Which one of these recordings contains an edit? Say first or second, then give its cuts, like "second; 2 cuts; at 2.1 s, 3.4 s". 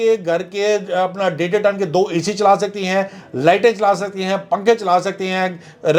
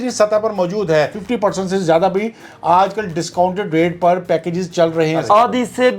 second; 2 cuts; at 1.2 s, 5.2 s